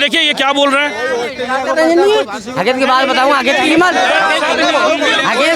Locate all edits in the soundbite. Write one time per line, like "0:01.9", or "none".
none